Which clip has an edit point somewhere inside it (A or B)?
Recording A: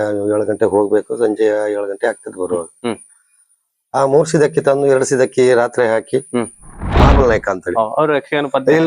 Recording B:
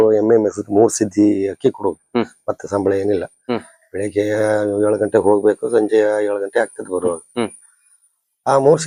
A